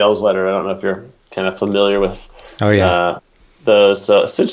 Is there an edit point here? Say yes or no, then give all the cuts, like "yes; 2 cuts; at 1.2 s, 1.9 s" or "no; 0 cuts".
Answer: no; 0 cuts